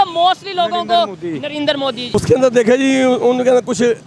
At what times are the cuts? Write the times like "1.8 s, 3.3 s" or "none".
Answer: 2.1 s